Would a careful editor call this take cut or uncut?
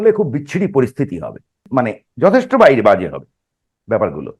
cut